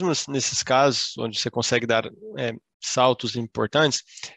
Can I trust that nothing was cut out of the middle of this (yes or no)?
yes